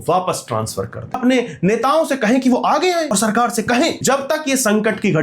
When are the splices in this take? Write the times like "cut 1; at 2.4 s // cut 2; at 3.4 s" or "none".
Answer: cut 1; at 1.2 s // cut 2; at 3.1 s // cut 3; at 4.0 s